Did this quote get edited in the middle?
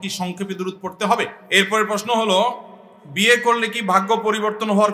yes; 1 cut; at 1.4 s

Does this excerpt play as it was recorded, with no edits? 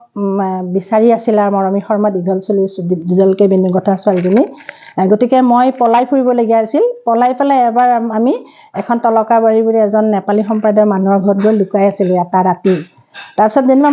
yes; 0 cuts

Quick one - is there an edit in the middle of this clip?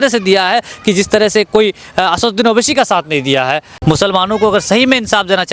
yes; 1 cut; at 3.7 s

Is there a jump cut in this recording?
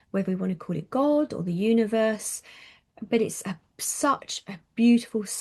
no; 0 cuts

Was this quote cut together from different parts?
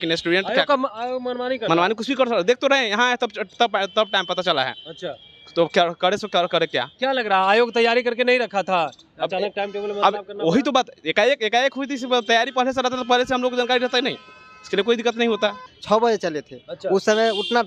yes; 1 cut; at 15.7 s

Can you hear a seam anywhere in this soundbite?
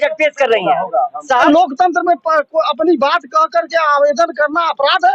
yes; 1 cut; at 1.4 s

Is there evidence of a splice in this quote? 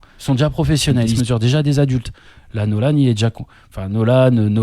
yes; 1 cut; at 2.5 s

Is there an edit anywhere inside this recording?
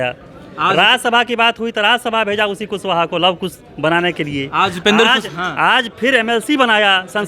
no; 0 cuts

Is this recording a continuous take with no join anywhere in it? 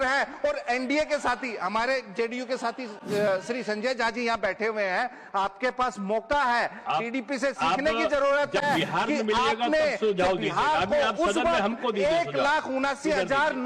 yes; 0 cuts

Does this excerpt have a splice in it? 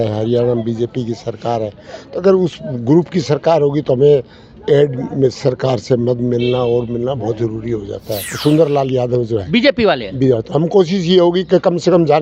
yes; 1 cut; at 8.3 s

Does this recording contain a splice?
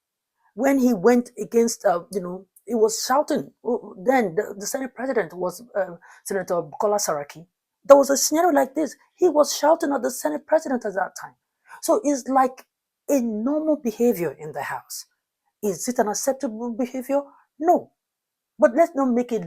yes; 1 cut; at 11.7 s

